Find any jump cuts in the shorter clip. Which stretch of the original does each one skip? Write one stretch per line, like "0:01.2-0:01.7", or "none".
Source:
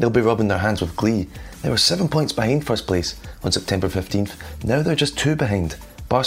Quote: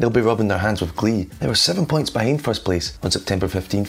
0:01.3-0:01.5
0:03.1-0:03.3